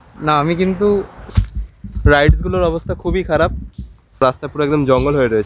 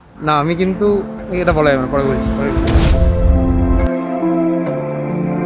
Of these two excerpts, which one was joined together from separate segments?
first; 1 cut; at 1.3 s

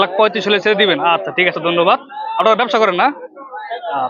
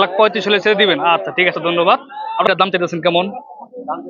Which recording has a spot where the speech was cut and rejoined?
second; 1 cut; at 2.5 s

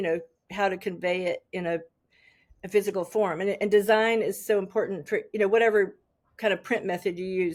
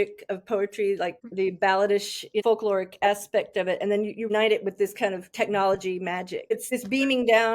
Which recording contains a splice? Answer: second; 4 cuts; at 1.2 s, 2.4 s, 4.3 s, 6.7 s

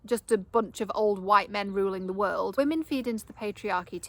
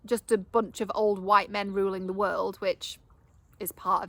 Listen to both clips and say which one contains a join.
first; 1 cut; at 2.5 s

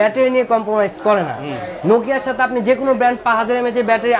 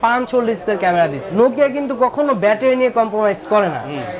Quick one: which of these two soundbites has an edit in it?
second; 1 cut; at 1.2 s

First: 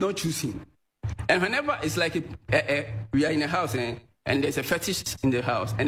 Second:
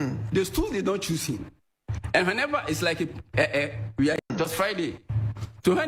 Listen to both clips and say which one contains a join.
second; 1 cut; at 4.2 s

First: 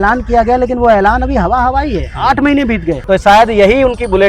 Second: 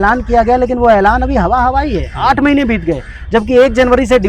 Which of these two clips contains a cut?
first; 1 cut; at 3.0 s

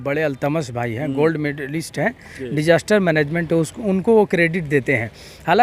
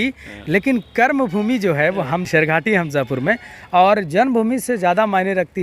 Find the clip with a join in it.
second; 1 cut; at 2.3 s

